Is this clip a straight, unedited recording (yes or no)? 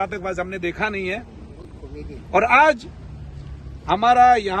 yes